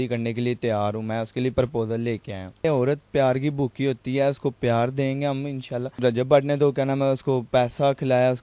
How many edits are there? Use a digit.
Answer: 2